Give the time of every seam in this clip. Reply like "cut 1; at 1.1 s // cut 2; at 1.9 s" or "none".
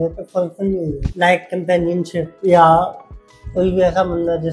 none